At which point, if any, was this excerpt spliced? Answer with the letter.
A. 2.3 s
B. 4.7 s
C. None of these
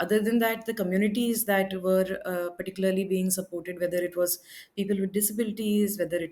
C